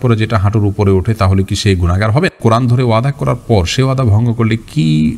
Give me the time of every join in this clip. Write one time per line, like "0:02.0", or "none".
0:02.4